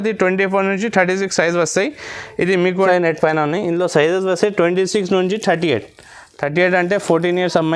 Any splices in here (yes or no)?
yes